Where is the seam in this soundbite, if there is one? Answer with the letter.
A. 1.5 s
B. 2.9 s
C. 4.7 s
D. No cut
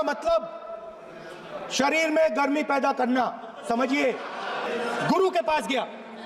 C